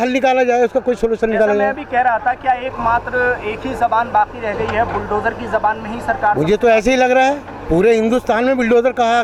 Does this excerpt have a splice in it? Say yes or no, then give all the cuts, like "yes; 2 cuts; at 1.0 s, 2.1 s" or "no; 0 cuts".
no; 0 cuts